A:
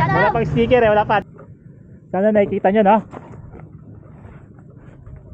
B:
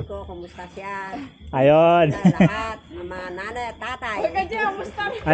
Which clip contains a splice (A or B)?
A